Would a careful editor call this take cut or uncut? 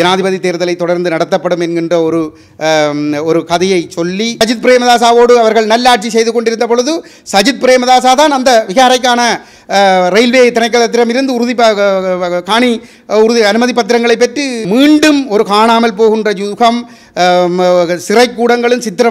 cut